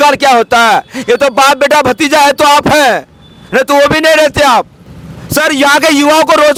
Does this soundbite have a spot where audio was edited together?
no; 0 cuts

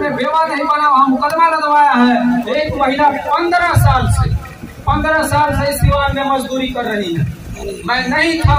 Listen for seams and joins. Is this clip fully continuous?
no; 1 cut; at 2.5 s

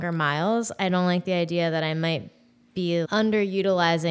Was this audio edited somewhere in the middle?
yes; 1 cut; at 3.1 s

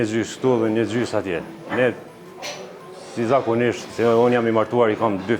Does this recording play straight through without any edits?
yes; 0 cuts

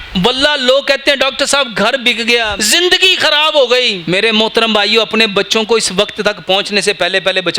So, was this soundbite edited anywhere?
yes; 2 cuts; at 2.6 s, 4.0 s

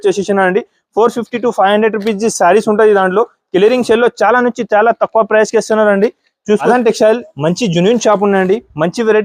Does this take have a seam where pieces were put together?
yes; 1 cut; at 6.6 s

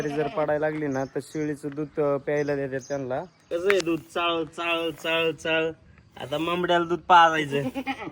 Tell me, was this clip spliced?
yes; 1 cut; at 3.4 s

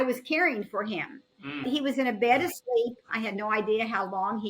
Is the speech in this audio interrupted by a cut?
yes; 2 cuts; at 1.6 s, 3.1 s

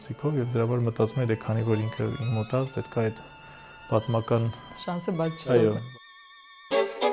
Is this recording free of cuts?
yes; 0 cuts

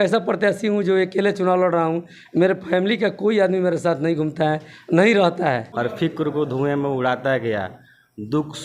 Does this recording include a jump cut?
yes; 1 cut; at 5.7 s

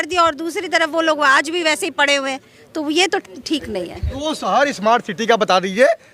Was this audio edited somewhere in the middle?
yes; 1 cut; at 4.0 s

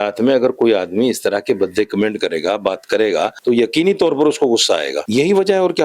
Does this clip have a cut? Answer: yes; 1 cut; at 3.4 s

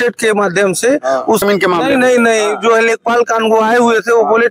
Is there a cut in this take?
yes; 1 cut; at 1.4 s

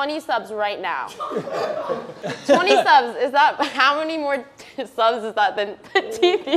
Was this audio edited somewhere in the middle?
yes; 1 cut; at 2.2 s

